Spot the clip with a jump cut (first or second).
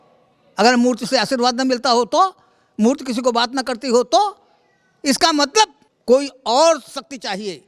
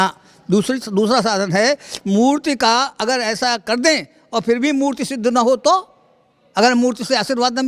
first